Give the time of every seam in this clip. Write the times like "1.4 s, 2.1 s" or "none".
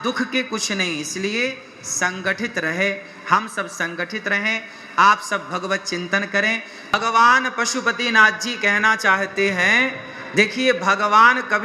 6.9 s